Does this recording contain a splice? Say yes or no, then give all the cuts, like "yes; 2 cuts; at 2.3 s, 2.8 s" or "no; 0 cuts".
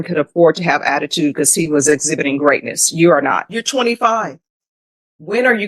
yes; 1 cut; at 3.6 s